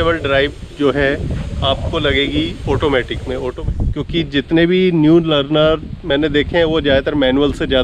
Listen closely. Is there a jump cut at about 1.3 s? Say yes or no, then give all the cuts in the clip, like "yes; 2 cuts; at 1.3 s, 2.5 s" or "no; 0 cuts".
no; 1 cut; at 3.5 s